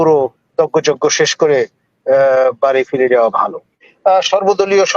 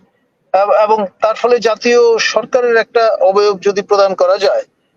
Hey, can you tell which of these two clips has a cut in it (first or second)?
first